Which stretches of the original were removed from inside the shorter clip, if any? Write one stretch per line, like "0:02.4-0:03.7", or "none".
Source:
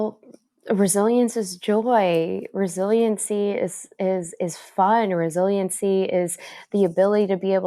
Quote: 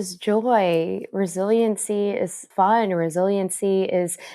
0:03.8-0:04.6